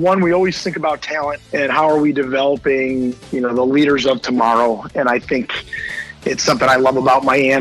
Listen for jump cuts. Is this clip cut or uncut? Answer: cut